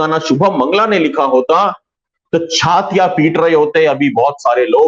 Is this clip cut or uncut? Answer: uncut